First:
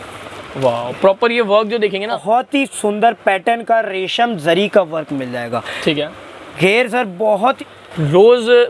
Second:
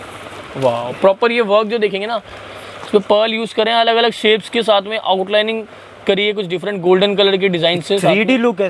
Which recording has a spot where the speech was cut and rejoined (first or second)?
first